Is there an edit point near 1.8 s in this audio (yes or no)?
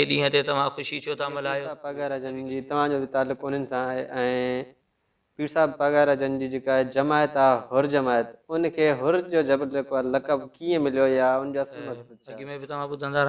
yes